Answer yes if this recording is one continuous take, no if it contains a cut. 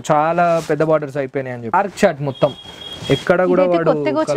no